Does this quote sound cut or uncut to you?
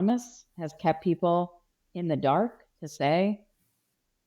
uncut